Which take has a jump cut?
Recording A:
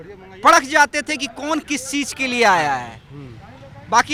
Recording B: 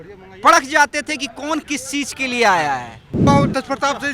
B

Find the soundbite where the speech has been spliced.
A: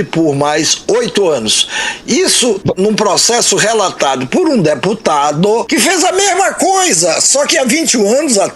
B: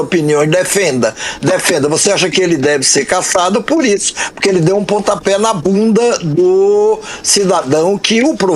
A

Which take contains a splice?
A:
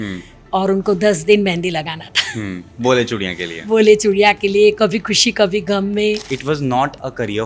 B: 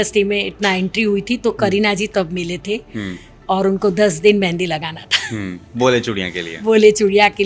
A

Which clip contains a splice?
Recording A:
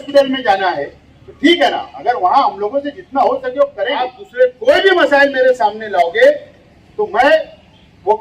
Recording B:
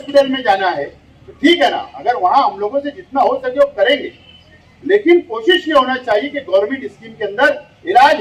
A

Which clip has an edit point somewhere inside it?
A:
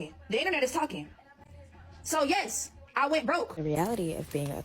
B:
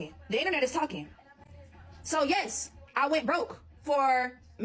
A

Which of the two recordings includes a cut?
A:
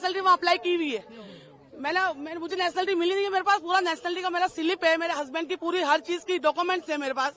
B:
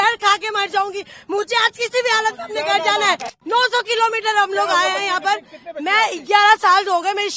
B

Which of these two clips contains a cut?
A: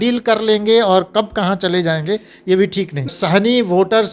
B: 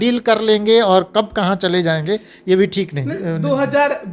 A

